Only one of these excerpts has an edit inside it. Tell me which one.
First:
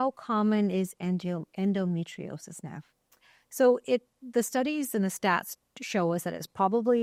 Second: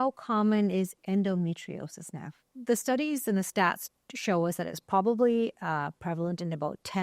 second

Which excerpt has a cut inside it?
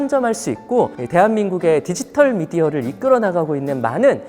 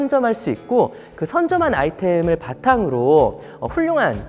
first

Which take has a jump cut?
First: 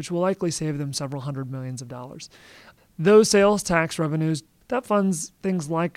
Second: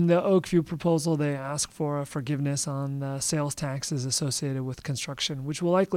first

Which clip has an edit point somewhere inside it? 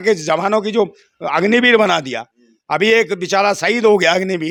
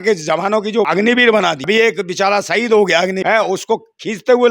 second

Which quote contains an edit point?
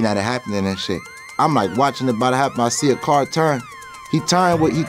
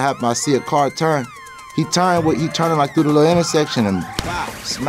first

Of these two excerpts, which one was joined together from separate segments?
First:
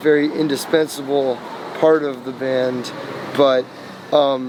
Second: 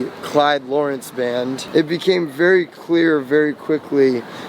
second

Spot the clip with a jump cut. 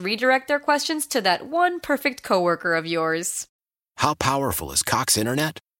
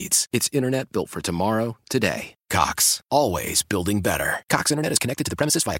first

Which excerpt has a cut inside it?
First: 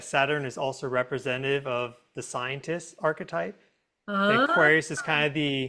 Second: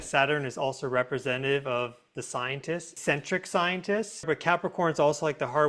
second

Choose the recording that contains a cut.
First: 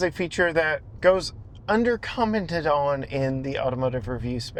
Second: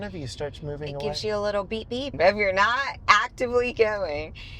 second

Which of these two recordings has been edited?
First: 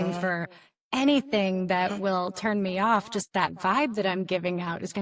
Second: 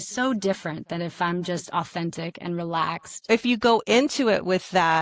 second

